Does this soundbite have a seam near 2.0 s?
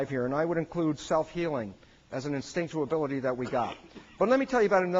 no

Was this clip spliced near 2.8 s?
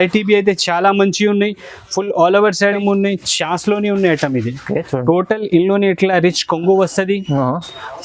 yes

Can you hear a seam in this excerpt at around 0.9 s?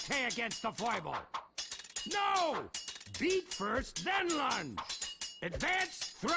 yes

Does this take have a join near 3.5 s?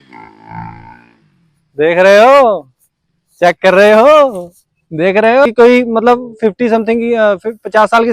no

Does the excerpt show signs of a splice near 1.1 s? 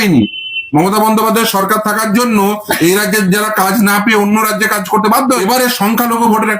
no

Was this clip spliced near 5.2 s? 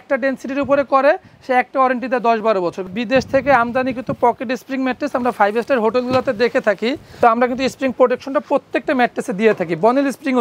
no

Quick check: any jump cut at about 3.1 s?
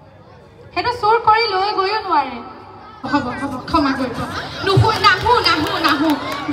yes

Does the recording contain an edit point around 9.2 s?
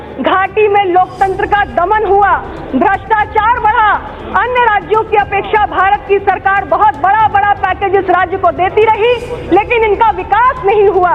no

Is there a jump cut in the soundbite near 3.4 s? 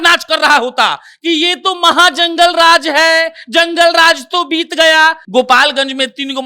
no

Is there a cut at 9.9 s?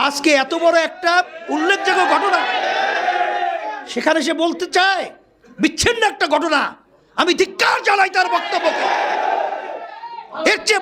no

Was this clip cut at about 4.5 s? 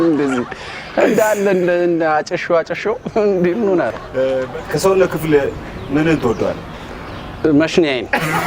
yes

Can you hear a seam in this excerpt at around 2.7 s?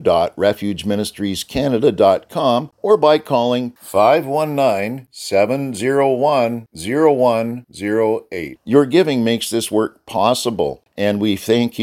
yes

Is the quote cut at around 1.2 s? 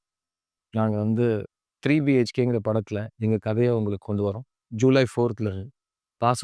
no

